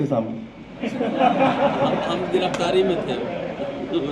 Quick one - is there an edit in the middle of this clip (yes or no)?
no